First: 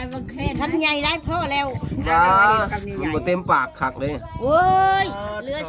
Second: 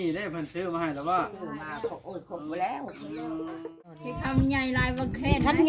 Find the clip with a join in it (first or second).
second